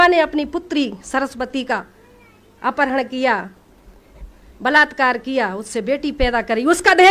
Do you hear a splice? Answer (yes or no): no